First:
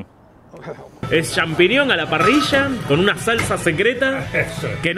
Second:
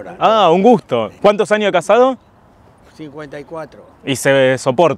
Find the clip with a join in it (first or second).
first